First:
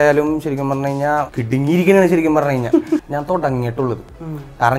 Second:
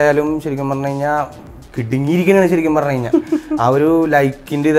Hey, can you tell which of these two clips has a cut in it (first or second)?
first